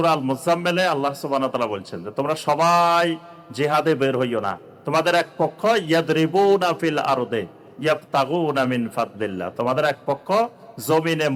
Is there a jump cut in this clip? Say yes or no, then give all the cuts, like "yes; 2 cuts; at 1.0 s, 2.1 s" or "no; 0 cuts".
no; 0 cuts